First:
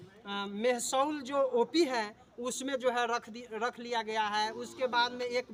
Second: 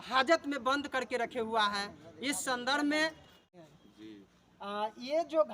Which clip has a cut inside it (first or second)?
second